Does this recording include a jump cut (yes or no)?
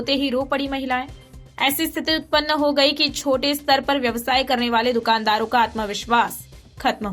no